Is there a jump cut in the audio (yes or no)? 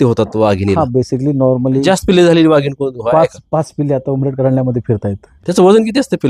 yes